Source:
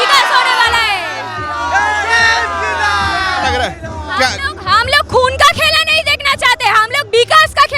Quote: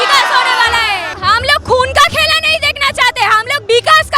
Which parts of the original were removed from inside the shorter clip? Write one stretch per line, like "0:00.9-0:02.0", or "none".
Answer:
0:01.1-0:04.5